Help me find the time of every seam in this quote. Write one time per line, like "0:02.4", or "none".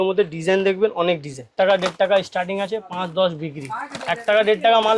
0:01.5